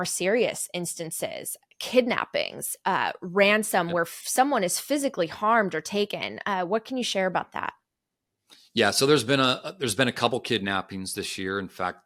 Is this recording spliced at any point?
no; 0 cuts

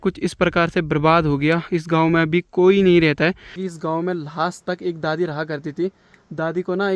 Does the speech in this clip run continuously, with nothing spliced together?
no; 1 cut; at 3.5 s

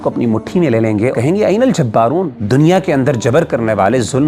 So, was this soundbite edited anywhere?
yes; 2 cuts; at 1.1 s, 2.4 s

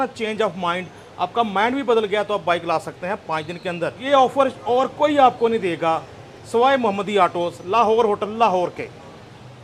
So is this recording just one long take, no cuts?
yes; 0 cuts

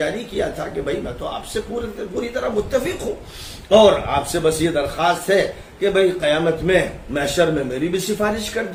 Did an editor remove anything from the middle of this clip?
no; 0 cuts

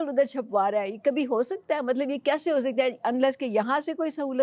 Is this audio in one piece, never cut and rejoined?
yes; 0 cuts

